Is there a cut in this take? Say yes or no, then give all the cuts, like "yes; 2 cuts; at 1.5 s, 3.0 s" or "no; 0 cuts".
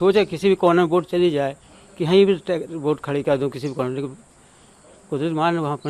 no; 0 cuts